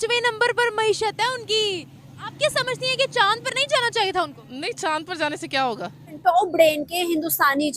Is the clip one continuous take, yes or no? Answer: no